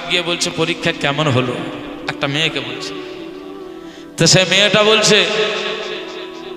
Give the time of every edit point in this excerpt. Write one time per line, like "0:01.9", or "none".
0:02.7
0:04.1